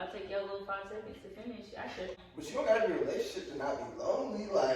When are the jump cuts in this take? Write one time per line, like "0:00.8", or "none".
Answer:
0:02.2